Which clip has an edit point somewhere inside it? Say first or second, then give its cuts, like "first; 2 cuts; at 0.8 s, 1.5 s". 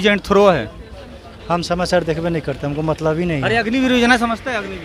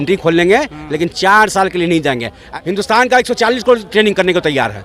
second; 1 cut; at 2.4 s